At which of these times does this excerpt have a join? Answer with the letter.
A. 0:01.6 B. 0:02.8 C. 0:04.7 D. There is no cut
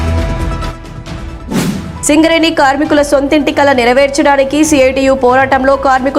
A